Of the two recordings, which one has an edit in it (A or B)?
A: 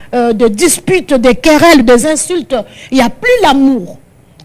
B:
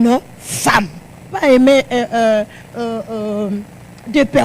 B